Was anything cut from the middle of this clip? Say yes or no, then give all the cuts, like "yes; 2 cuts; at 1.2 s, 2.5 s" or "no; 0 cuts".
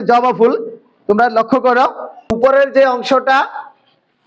yes; 1 cut; at 2.3 s